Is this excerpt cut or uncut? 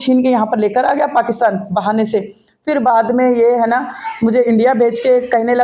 uncut